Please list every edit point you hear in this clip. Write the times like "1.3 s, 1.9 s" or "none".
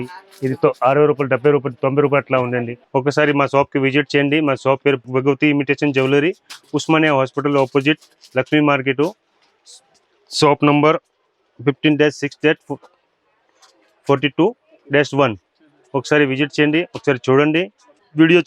none